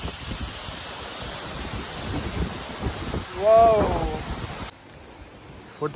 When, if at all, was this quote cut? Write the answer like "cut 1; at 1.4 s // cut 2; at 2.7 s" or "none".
cut 1; at 4.8 s